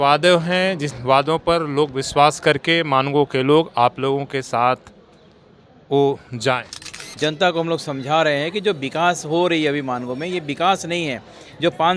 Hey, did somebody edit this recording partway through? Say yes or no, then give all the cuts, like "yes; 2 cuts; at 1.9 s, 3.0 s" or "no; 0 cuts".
yes; 1 cut; at 7.0 s